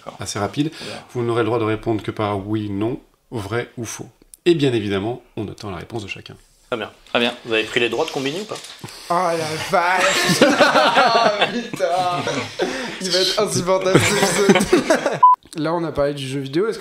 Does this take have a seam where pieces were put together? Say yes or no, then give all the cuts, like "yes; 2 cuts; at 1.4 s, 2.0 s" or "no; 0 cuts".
yes; 1 cut; at 15.2 s